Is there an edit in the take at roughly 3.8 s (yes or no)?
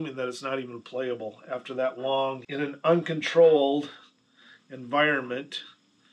no